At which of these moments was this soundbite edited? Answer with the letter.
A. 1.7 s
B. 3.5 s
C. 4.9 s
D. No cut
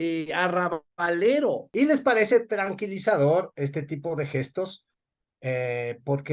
A